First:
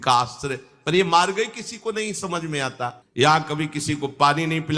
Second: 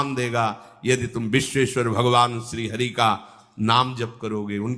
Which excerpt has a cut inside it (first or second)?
first